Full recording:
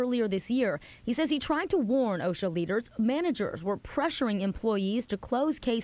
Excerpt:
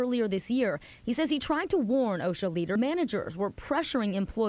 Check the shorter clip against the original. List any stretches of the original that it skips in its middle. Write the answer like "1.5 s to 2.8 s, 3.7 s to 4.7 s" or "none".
2.8 s to 3.0 s

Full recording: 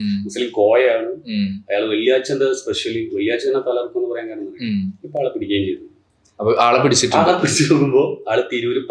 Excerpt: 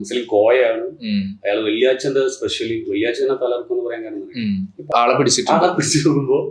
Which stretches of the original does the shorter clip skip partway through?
5.2 s to 6.6 s

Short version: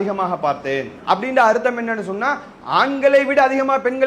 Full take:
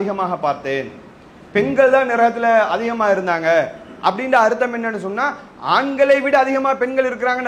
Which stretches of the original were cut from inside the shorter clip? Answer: 0.9 s to 3.9 s

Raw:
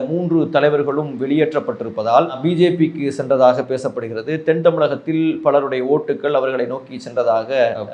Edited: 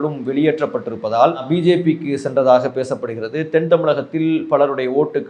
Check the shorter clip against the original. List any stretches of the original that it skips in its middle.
none

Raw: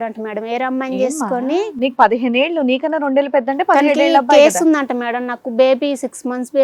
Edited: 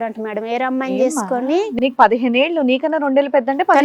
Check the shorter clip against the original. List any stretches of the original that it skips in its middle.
none

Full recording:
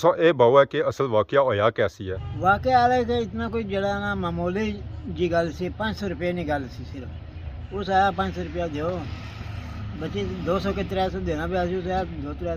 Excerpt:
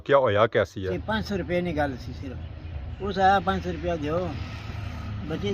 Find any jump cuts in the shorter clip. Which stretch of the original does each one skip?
2.2 s to 5.7 s

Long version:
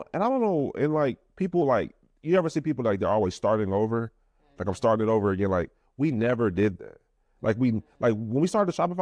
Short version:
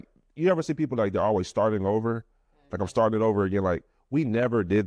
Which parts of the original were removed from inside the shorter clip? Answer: none

